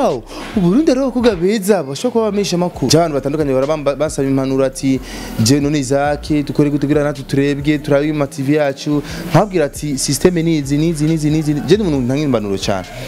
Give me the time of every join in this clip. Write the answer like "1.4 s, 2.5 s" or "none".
2.9 s